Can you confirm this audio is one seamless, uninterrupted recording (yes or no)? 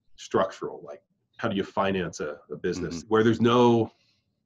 no